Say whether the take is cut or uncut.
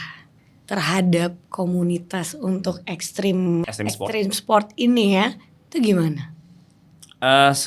cut